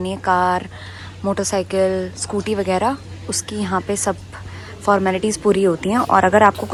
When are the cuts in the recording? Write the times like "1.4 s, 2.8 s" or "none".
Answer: none